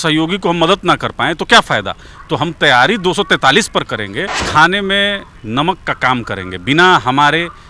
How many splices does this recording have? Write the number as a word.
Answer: one